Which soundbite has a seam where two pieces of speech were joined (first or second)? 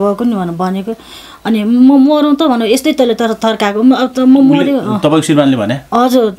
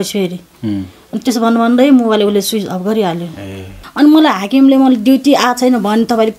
second